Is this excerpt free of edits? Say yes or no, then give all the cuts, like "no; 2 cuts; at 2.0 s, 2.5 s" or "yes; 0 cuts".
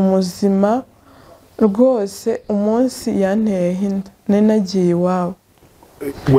yes; 0 cuts